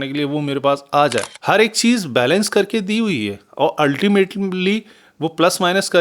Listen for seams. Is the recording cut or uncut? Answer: cut